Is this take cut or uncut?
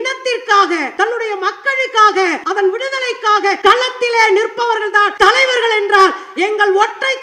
cut